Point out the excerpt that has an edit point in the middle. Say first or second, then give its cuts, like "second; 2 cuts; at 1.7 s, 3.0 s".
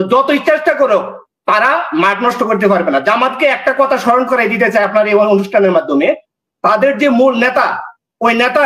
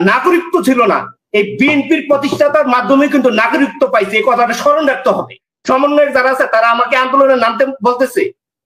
second; 1 cut; at 5.5 s